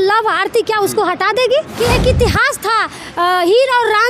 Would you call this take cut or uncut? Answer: cut